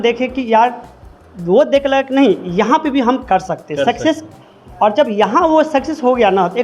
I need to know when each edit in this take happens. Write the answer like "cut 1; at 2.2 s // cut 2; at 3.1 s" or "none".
none